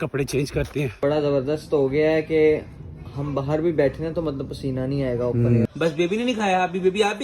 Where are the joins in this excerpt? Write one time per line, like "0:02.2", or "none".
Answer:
0:01.0
0:05.7